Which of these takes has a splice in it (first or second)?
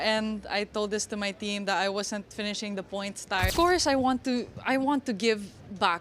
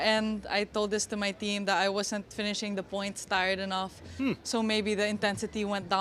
first